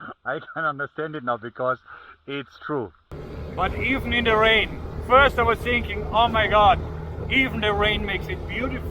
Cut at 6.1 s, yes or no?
no